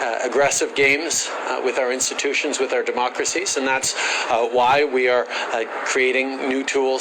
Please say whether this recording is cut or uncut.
uncut